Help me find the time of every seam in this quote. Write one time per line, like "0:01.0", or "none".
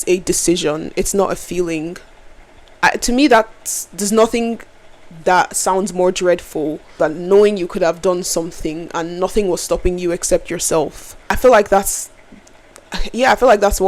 0:02.6
0:06.9
0:11.4